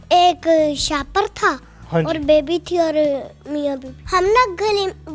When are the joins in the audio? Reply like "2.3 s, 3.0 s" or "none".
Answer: 3.9 s